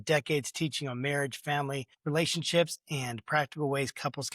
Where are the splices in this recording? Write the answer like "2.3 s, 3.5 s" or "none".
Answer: 1.9 s